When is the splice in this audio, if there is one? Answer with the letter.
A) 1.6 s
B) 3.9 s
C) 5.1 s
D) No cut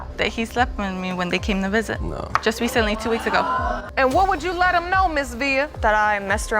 B